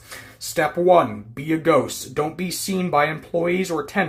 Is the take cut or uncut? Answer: uncut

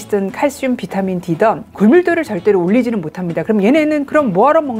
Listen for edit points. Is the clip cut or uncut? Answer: cut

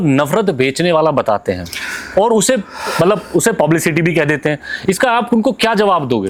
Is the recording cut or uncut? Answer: uncut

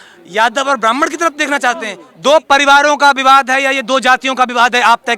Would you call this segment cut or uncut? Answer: cut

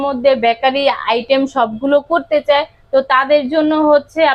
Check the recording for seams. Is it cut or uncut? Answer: uncut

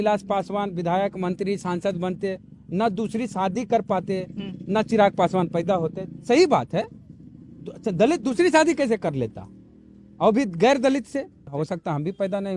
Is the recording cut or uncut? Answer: cut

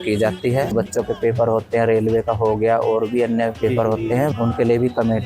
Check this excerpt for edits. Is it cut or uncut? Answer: cut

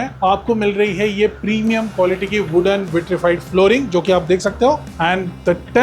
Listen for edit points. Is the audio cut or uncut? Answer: cut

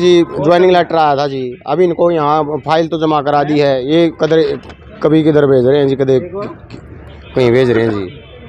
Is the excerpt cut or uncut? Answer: uncut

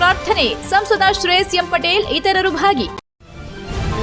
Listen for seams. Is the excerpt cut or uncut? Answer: cut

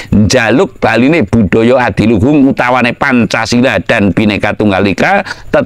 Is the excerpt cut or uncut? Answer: uncut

